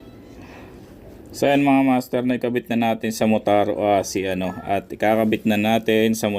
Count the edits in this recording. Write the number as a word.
zero